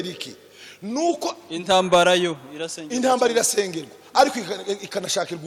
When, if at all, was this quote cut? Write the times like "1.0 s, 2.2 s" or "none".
none